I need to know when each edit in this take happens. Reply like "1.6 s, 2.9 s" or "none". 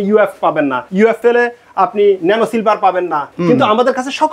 1.0 s, 3.3 s